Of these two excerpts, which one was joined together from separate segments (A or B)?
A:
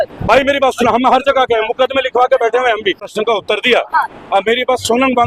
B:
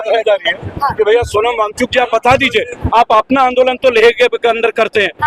A